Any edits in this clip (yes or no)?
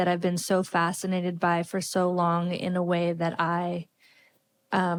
no